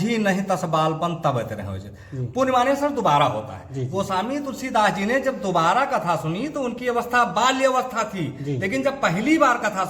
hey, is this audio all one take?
yes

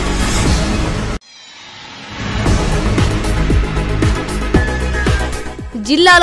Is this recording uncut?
no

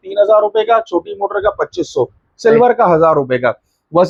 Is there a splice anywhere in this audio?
no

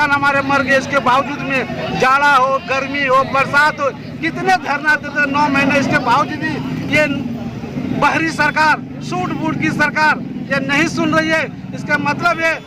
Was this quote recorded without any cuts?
yes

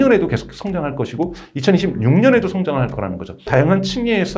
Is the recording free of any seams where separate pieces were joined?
no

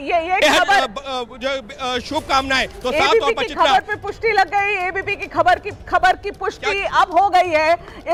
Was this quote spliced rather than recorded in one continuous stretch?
no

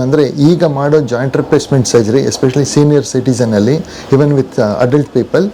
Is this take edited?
no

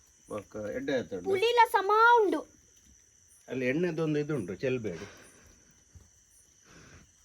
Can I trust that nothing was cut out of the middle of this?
yes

